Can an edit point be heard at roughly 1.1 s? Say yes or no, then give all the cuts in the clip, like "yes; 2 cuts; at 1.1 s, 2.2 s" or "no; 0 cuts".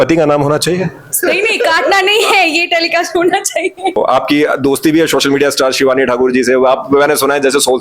yes; 2 cuts; at 1.1 s, 4.0 s